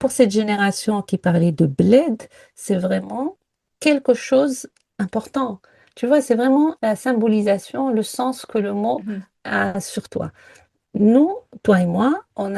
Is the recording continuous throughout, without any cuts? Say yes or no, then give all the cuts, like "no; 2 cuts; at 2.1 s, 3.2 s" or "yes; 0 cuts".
yes; 0 cuts